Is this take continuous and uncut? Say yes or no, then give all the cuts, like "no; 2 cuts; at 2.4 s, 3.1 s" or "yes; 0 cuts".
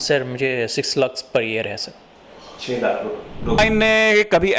no; 1 cut; at 3.6 s